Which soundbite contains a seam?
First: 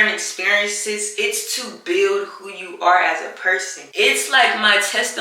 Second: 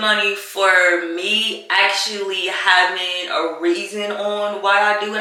first; 2 cuts; at 1.1 s, 3.9 s

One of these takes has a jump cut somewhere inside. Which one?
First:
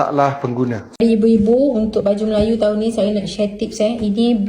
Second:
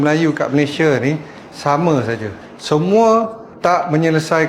first; 1 cut; at 0.9 s

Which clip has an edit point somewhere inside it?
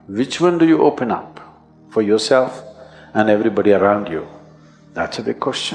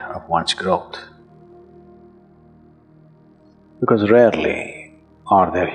second; 2 cuts; at 1.0 s, 3.4 s

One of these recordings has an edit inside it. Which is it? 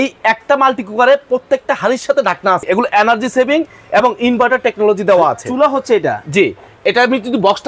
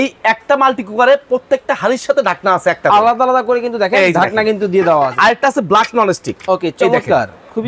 first; 1 cut; at 2.6 s

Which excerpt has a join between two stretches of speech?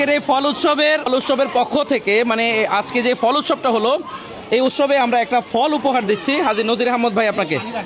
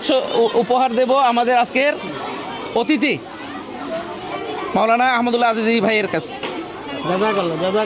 first; 1 cut; at 1.1 s

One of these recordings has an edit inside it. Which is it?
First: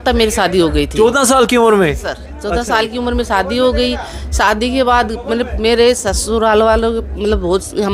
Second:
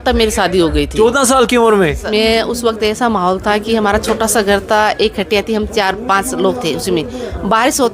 second; 1 cut; at 2.1 s

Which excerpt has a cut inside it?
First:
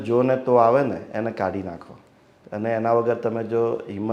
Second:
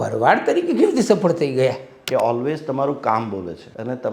second; 1 cut; at 1.9 s

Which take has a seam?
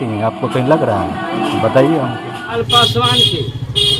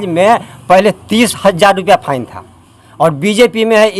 first; 1 cut; at 2.5 s

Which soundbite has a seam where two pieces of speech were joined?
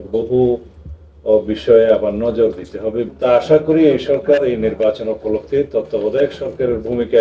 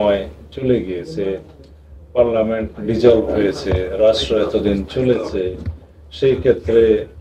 first; 1 cut; at 3.1 s

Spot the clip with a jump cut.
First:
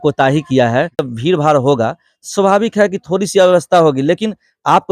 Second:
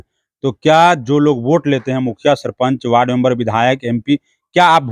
first; 1 cut; at 1.1 s

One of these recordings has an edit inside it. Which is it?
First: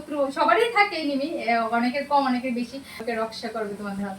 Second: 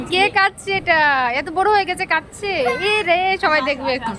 first; 1 cut; at 3.0 s

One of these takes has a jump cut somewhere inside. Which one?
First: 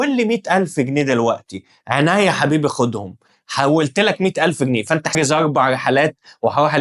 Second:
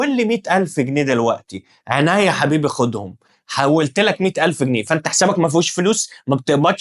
first; 1 cut; at 5.2 s

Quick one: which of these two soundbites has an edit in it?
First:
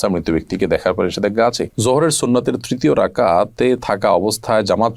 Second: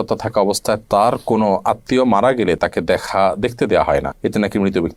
first; 1 cut; at 1.7 s

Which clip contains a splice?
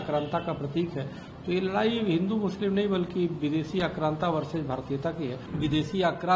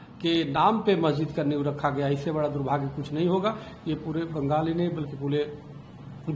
first; 1 cut; at 5.4 s

